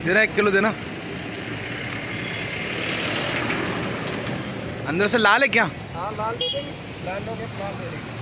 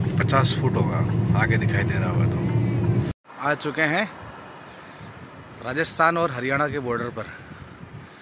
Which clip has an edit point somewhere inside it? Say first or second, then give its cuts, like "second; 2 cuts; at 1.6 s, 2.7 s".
second; 1 cut; at 3.1 s